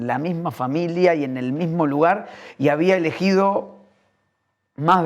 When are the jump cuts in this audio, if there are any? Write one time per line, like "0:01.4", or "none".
none